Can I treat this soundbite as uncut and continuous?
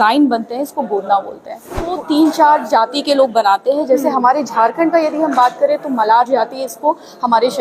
no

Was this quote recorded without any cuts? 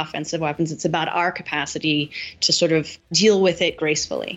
no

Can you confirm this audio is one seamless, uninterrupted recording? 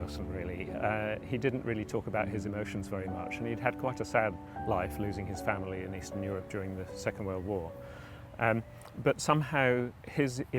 yes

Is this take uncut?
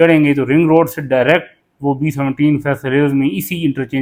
yes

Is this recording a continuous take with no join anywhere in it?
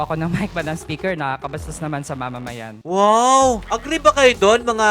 no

